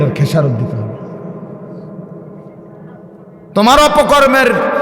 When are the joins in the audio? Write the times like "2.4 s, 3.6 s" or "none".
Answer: none